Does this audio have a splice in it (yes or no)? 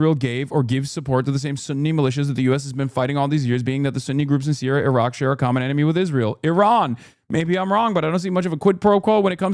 no